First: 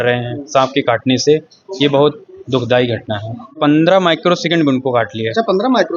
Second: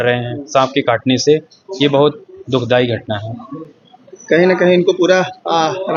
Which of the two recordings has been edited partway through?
first; 1 cut; at 3.6 s

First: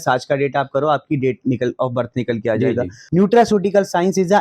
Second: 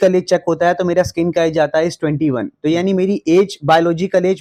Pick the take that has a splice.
first; 1 cut; at 3.0 s

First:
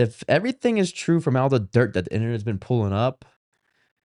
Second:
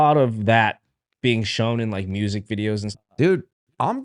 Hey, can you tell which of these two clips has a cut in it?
second; 1 cut; at 2.9 s

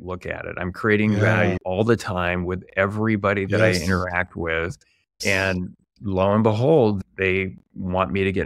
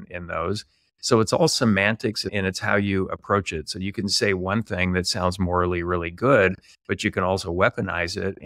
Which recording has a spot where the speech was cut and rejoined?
first; 2 cuts; at 1.6 s, 5.2 s

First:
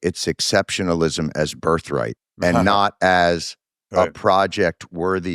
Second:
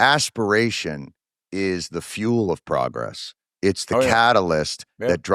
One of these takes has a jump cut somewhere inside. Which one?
first; 1 cut; at 2.2 s

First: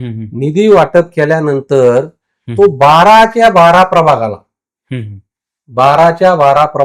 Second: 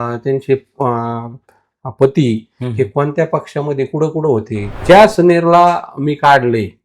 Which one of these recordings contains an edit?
second; 1 cut; at 4.7 s

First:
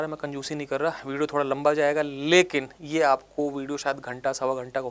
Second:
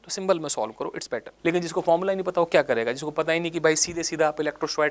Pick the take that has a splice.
second; 1 cut; at 1.2 s

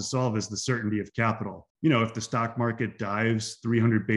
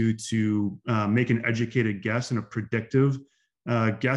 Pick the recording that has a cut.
first; 1 cut; at 1.6 s

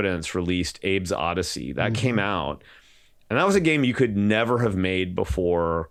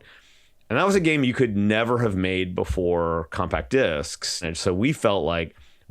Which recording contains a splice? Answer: second; 1 cut; at 4.4 s

